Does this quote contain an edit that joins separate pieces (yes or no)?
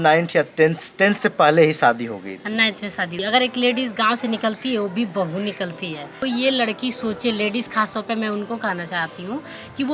yes